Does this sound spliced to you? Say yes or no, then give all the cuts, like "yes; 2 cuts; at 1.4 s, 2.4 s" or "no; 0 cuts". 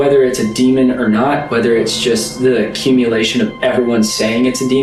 no; 0 cuts